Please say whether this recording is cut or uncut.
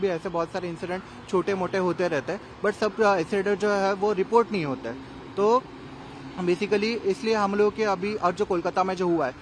uncut